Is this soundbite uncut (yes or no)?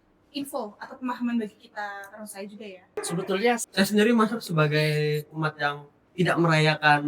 no